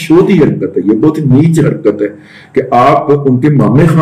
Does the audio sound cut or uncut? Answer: uncut